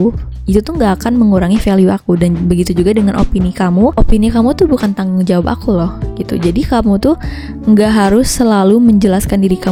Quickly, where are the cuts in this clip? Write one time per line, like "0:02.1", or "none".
none